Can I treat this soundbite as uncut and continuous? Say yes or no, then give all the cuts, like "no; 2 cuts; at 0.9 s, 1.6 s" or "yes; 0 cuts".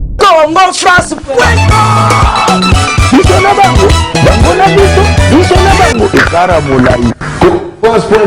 yes; 0 cuts